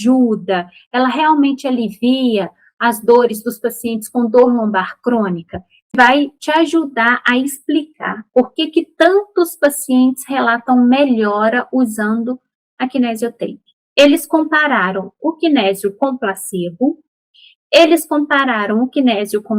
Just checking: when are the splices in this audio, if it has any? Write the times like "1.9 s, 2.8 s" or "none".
5.9 s, 13.8 s